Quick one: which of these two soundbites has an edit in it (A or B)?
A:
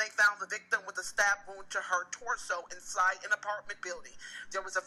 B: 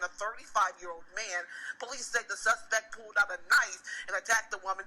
B